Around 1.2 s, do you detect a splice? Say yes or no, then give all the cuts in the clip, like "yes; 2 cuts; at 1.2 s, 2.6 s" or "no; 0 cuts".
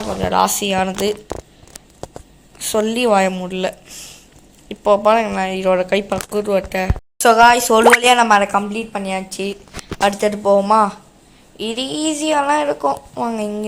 no; 1 cut; at 7.0 s